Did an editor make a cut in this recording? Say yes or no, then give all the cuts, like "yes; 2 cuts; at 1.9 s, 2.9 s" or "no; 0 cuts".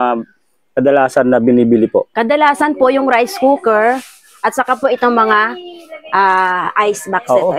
no; 0 cuts